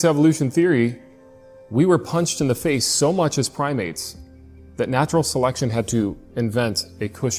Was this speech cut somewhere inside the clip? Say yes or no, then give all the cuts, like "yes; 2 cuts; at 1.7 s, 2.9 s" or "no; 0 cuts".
no; 0 cuts